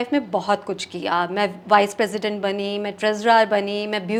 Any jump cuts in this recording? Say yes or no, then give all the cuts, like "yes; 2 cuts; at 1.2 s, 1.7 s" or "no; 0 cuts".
no; 0 cuts